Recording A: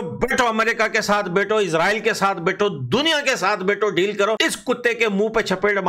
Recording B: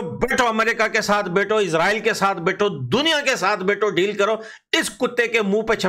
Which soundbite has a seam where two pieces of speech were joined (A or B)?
A